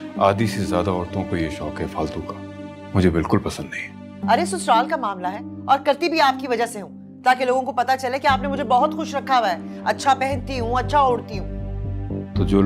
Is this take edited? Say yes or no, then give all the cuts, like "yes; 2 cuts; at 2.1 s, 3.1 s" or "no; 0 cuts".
yes; 1 cut; at 4.1 s